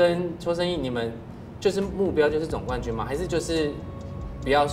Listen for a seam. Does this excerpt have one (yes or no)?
no